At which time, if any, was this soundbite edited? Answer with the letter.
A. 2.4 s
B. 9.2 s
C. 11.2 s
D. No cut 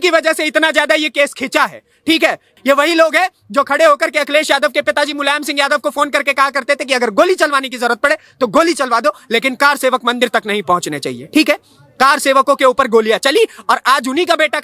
A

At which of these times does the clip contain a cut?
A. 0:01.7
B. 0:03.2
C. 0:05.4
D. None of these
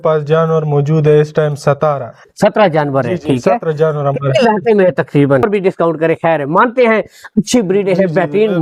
C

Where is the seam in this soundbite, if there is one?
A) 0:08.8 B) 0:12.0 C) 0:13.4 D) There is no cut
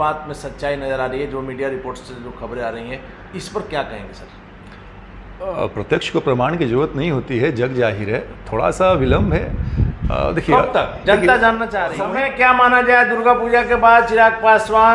B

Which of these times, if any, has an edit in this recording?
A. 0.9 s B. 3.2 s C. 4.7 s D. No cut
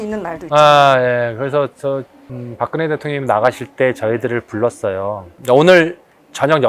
D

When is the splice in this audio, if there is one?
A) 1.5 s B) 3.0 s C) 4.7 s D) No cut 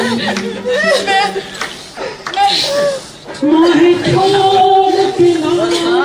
D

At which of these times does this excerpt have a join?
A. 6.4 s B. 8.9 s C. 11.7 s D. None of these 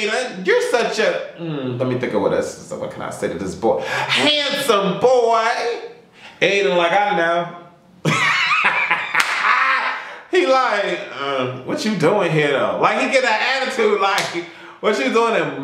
D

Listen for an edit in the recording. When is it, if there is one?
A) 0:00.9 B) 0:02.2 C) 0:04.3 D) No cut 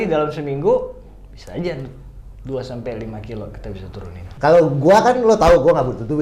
C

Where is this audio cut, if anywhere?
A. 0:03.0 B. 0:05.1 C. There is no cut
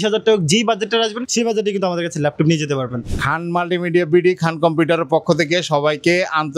A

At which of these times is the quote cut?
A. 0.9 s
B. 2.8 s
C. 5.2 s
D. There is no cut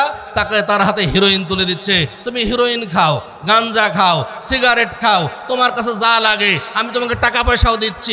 D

